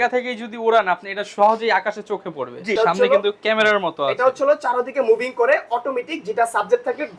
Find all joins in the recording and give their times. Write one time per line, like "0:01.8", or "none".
0:02.8